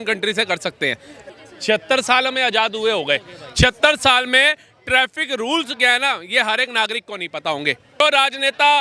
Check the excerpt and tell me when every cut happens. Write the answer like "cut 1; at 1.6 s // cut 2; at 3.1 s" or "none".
cut 1; at 1.2 s // cut 2; at 8.0 s